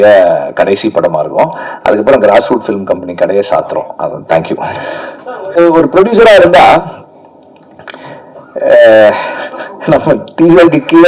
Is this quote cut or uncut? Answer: cut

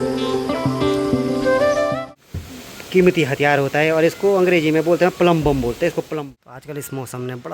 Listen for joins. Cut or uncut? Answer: cut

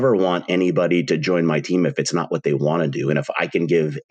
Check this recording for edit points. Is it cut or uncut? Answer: uncut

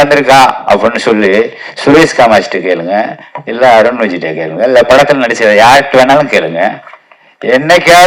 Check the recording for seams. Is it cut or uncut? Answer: uncut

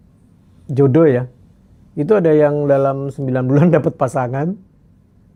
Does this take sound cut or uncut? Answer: uncut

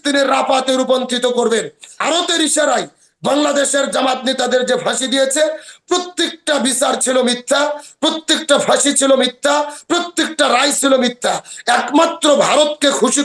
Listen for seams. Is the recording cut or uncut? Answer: cut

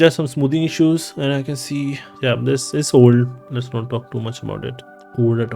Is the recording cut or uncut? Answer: uncut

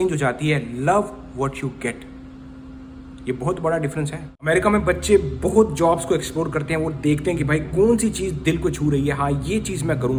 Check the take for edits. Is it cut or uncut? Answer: uncut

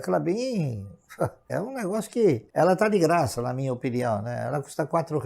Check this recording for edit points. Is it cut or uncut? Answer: cut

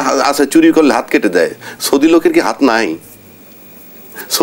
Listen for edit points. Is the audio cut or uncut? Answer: uncut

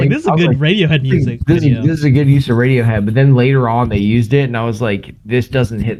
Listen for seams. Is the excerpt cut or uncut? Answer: uncut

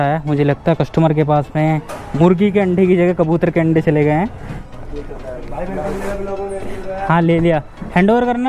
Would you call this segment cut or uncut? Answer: cut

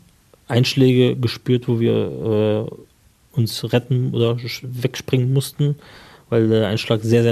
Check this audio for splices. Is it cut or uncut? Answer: uncut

